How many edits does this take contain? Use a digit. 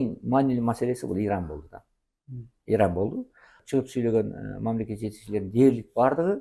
1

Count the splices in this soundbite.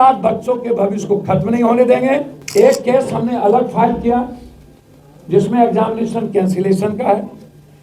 1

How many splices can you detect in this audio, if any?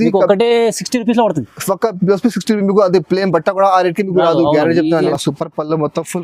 1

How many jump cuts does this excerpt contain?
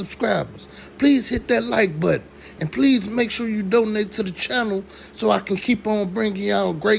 0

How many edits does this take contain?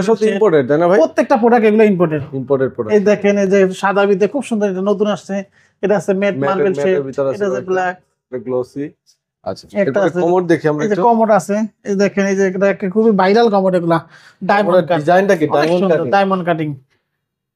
0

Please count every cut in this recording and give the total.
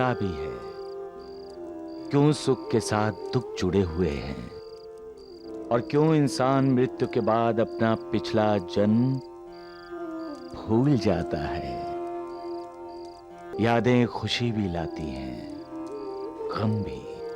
1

